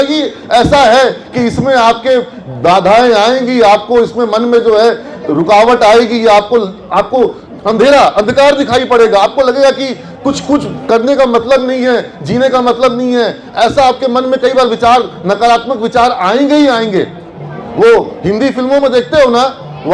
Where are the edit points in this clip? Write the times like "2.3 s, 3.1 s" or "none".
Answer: none